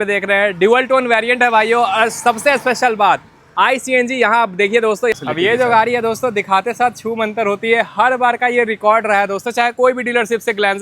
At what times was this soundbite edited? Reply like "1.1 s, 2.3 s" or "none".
5.1 s